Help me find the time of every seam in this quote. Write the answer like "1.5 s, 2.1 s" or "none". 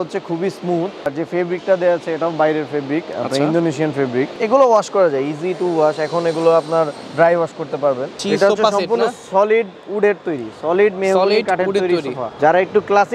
1.1 s, 4.4 s, 8.2 s, 12.3 s